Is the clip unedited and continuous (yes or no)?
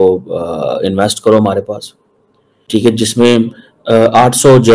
no